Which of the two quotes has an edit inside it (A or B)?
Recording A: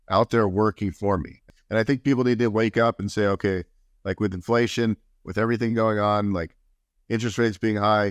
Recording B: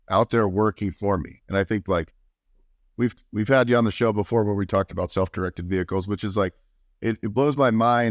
A